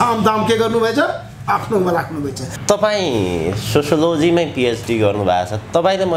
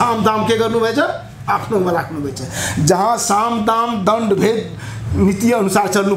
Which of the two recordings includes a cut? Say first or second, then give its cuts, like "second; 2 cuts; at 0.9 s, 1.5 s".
first; 1 cut; at 2.5 s